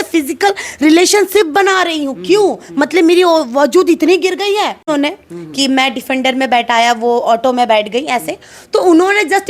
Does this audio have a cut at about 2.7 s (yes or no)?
no